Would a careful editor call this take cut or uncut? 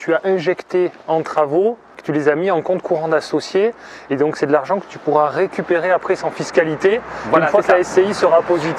cut